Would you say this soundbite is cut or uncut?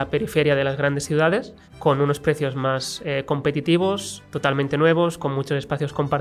uncut